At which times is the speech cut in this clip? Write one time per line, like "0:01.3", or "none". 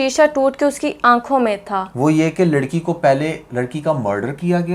0:01.9